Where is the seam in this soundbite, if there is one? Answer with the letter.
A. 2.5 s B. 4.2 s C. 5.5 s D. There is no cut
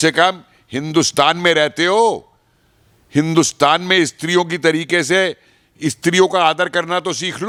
D